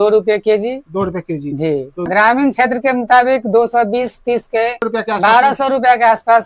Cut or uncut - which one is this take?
cut